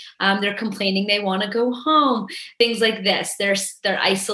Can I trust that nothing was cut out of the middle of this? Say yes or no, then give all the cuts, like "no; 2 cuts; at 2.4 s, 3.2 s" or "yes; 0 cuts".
no; 1 cut; at 2.4 s